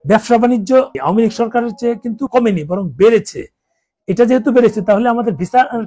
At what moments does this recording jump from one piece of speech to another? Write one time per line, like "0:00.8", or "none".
0:00.9
0:02.2